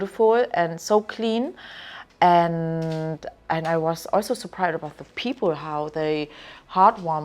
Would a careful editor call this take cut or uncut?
uncut